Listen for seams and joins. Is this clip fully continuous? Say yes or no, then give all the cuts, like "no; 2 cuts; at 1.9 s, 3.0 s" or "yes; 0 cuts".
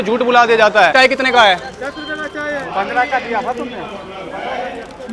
no; 1 cut; at 0.9 s